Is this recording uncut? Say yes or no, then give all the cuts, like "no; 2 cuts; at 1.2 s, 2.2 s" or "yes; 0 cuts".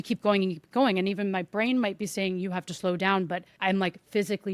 no; 1 cut; at 3.5 s